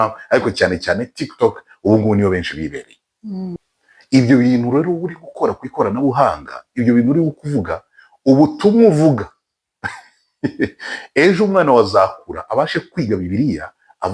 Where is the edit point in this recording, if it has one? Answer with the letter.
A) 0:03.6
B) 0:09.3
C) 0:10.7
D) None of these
A